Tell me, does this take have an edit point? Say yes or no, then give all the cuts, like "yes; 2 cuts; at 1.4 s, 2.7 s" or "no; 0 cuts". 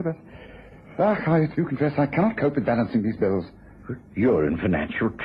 no; 0 cuts